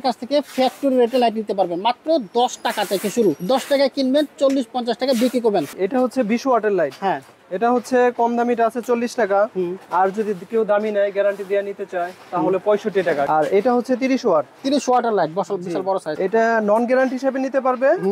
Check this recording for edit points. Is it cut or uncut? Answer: cut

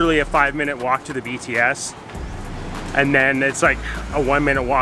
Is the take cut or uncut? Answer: uncut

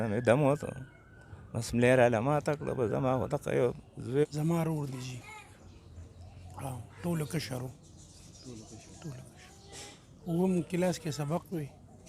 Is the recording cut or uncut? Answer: cut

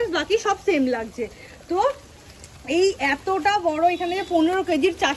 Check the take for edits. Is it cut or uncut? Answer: uncut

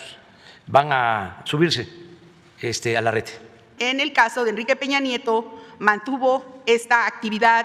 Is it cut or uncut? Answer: cut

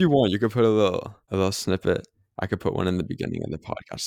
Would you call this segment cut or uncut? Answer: cut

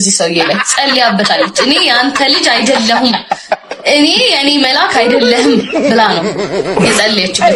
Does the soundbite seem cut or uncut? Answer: uncut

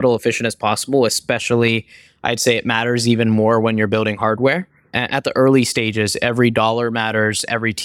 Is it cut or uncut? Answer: cut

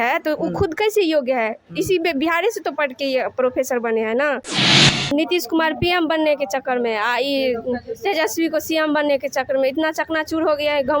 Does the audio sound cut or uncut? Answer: cut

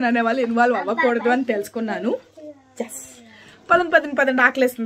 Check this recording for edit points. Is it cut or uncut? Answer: uncut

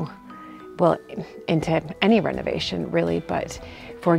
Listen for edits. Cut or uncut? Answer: uncut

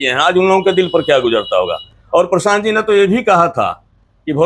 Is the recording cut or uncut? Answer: uncut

